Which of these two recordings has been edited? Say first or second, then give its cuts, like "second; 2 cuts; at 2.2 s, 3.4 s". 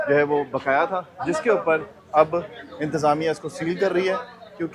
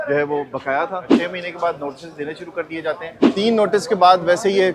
second; 2 cuts; at 1.1 s, 3.2 s